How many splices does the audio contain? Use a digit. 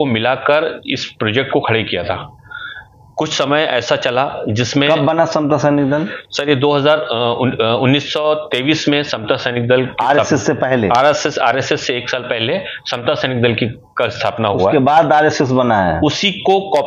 0